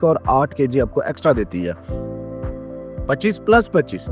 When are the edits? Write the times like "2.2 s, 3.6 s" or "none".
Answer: none